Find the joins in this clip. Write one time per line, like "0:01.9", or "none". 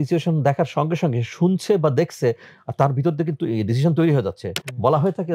none